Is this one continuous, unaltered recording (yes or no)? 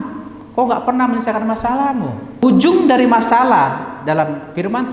no